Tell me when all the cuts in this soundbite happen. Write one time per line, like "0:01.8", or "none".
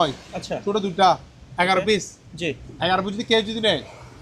none